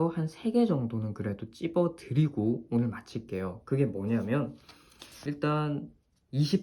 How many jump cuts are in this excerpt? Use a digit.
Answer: 1